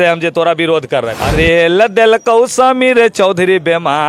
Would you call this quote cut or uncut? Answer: cut